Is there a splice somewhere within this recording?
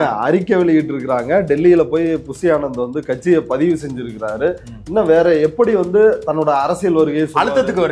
no; 0 cuts

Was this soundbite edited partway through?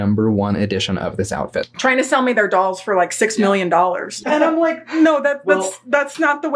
yes; 1 cut; at 1.7 s

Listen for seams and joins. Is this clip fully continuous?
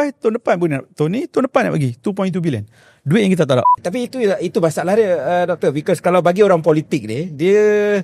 no; 1 cut; at 3.7 s

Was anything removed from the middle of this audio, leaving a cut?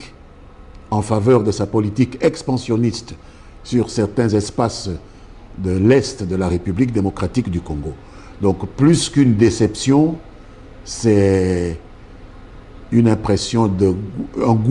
no; 0 cuts

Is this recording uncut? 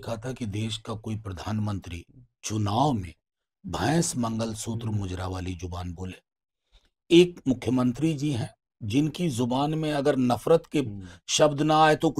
yes; 0 cuts

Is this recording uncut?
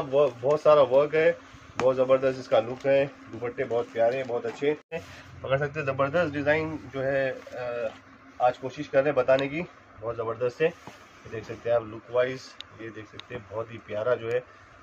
no; 1 cut; at 5.1 s

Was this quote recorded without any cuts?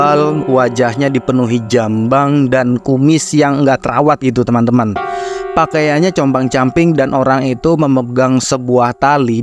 yes; 0 cuts

